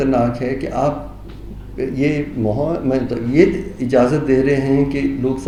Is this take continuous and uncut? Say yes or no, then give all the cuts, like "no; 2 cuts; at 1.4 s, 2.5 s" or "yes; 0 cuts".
yes; 0 cuts